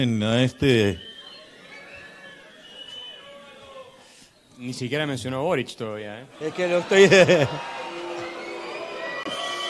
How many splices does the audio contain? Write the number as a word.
zero